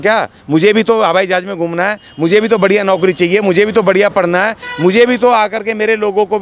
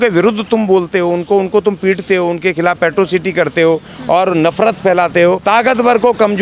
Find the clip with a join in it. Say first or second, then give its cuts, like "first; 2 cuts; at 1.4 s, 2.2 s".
second; 1 cut; at 5.4 s